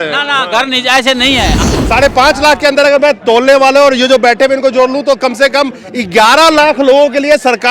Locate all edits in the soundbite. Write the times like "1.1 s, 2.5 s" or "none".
1.5 s